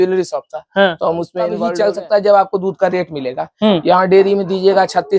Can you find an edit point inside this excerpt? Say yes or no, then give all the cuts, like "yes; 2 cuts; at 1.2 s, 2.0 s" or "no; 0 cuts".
yes; 1 cut; at 1.6 s